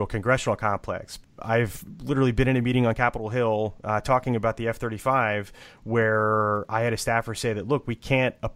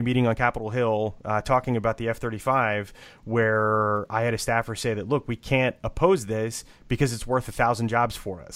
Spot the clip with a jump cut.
first; 1 cut; at 1.3 s

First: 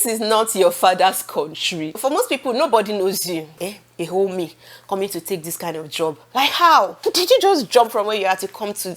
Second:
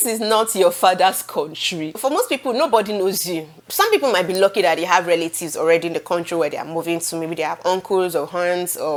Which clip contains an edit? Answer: first; 2 cuts; at 3.6 s, 6.2 s

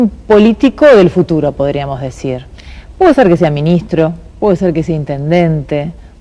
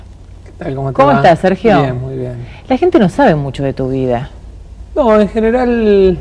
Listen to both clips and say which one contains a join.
first; 1 cut; at 4.2 s

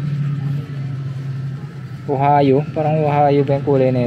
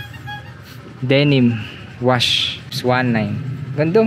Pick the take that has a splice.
second; 1 cut; at 2.8 s

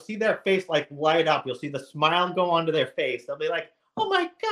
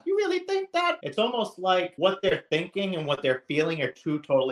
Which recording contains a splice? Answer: second; 2 cuts; at 1.0 s, 1.9 s

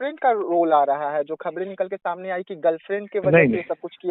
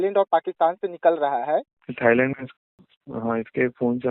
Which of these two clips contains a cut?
second; 1 cut; at 1.8 s

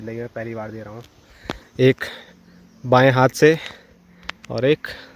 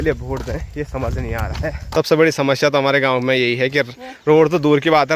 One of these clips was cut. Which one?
second; 1 cut; at 1.8 s

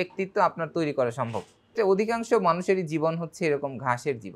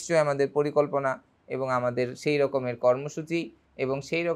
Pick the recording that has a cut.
first; 1 cut; at 1.7 s

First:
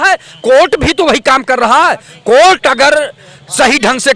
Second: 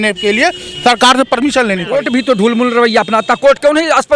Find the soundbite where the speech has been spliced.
second; 1 cut; at 1.9 s

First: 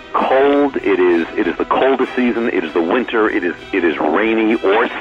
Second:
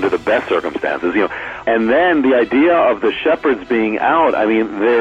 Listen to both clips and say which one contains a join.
second; 1 cut; at 1.6 s

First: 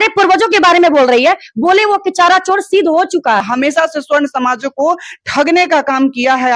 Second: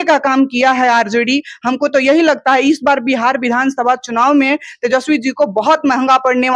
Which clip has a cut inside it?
first; 1 cut; at 3.4 s

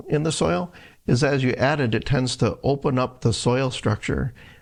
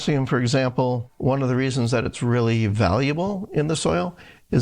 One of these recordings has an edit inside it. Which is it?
second; 1 cut; at 1.1 s

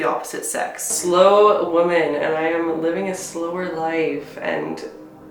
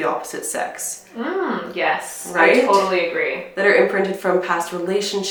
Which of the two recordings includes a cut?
first; 1 cut; at 0.9 s

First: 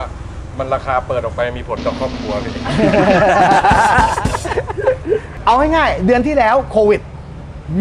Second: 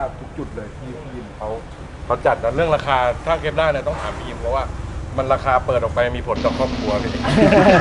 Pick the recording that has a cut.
first; 1 cut; at 5.3 s

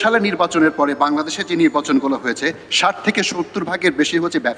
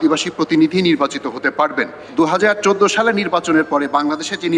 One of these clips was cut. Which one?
second; 1 cut; at 2.0 s

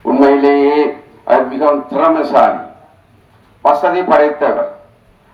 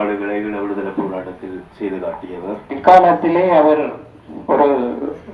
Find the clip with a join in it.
second; 1 cut; at 2.8 s

